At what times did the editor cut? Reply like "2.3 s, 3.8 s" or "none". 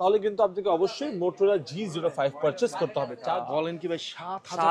3.2 s